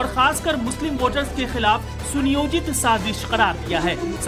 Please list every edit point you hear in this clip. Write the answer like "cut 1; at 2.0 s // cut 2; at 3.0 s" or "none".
none